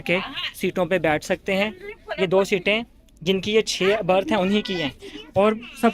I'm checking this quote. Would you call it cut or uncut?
uncut